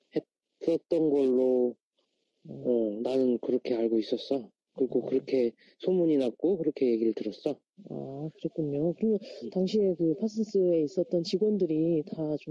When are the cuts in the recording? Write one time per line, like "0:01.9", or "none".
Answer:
0:05.5